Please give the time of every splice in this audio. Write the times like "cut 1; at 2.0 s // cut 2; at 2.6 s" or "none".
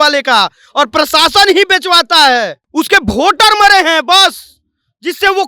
cut 1; at 2.6 s